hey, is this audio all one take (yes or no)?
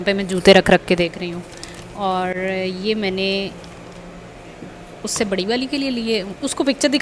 yes